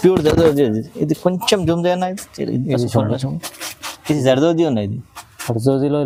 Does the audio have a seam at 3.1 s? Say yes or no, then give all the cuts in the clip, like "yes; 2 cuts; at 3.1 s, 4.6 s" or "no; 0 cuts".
no; 0 cuts